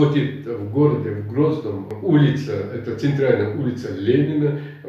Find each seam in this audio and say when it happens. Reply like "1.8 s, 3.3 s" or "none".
1.9 s